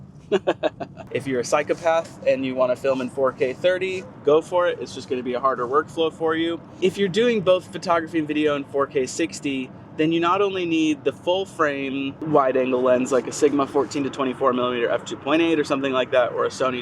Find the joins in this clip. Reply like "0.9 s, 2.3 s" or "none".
0.9 s